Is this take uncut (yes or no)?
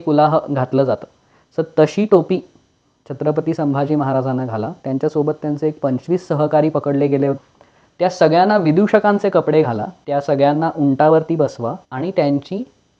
no